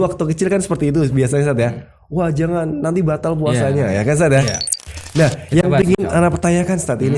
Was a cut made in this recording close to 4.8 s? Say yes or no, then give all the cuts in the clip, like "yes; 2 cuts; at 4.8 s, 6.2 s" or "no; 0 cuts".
yes; 1 cut; at 4.8 s